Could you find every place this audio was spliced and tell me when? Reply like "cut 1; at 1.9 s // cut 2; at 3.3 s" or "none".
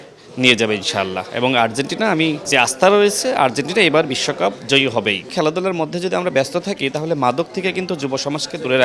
cut 1; at 2.5 s // cut 2; at 5.3 s